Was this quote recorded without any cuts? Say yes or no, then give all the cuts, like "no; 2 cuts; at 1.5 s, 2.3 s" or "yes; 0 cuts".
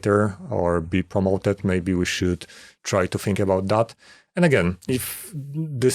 yes; 0 cuts